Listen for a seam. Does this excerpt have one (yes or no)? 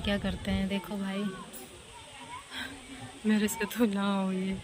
no